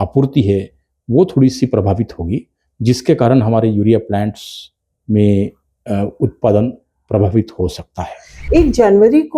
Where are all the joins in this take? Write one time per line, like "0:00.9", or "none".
0:08.4